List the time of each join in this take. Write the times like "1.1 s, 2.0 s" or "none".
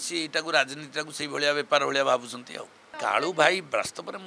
2.9 s